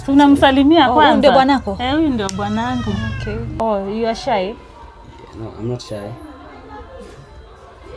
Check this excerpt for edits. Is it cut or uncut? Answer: cut